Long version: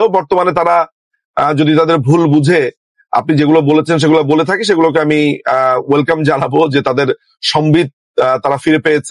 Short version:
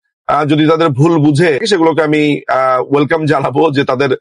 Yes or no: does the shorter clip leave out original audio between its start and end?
yes